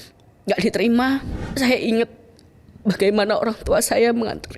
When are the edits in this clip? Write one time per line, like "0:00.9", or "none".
0:01.4